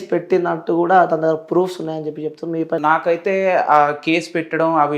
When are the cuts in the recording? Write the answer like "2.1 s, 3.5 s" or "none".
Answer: 2.8 s

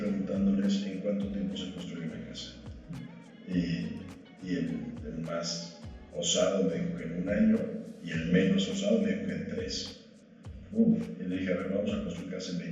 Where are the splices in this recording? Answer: none

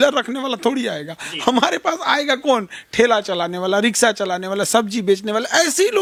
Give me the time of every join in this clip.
none

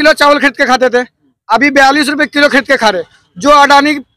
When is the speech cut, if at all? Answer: none

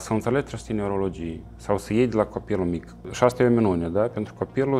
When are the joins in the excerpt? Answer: 3.0 s

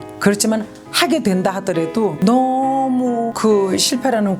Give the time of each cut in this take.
2.2 s, 3.3 s

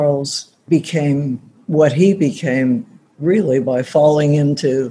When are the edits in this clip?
none

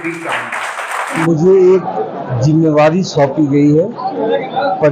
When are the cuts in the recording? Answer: 1.1 s

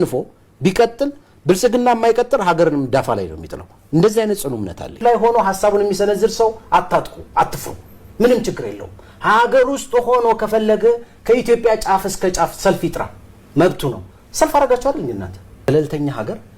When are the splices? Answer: 5.0 s, 15.6 s

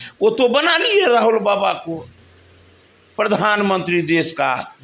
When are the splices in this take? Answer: none

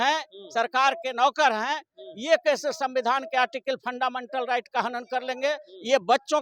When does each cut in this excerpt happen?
none

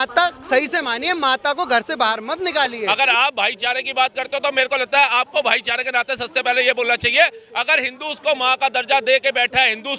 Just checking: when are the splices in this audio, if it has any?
2.8 s

